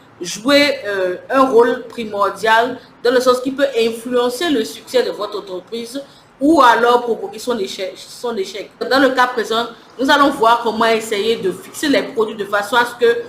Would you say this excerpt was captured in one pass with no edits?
no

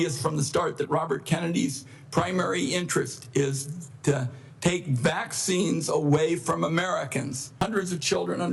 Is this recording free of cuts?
no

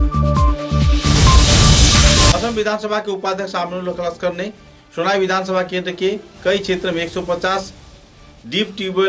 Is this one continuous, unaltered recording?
yes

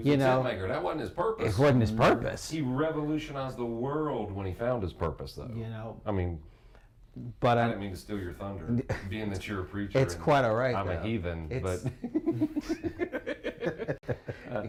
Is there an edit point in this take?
no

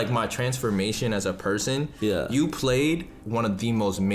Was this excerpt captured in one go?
no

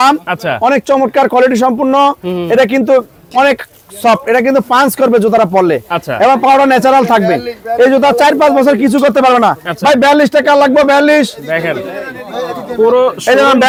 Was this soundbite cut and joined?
no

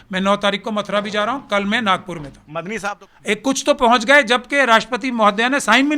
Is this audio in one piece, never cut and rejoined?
no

